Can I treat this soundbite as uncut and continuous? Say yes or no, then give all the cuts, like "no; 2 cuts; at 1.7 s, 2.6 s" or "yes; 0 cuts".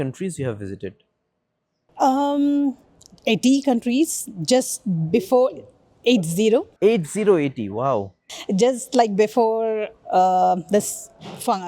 no; 1 cut; at 6.7 s